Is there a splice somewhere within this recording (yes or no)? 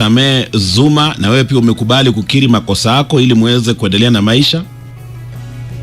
no